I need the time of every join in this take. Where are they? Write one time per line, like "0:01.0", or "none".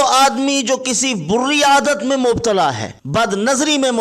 0:02.9